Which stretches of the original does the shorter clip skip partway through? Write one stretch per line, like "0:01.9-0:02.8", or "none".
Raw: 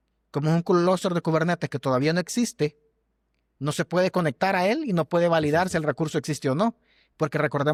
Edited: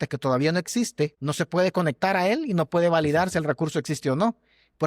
0:02.8-0:03.6